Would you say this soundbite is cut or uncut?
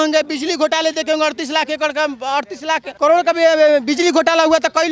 cut